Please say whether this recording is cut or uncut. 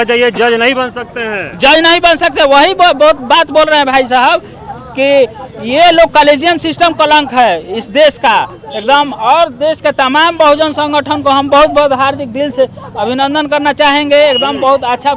uncut